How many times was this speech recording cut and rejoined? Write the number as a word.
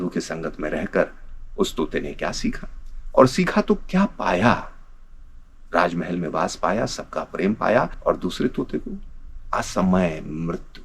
one